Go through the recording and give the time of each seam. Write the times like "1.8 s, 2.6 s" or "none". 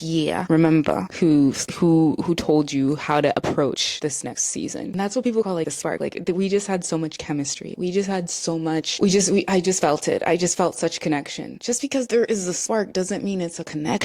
4.9 s, 8.9 s

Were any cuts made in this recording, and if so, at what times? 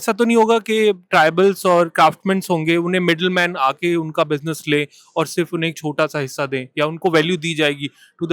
none

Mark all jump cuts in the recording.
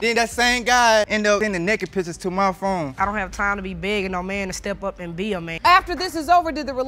2.9 s

